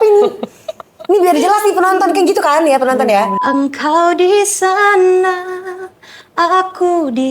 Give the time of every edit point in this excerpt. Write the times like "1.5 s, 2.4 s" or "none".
3.4 s